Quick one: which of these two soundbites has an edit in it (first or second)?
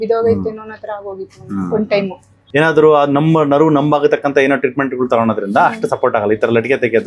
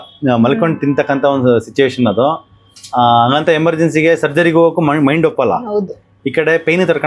first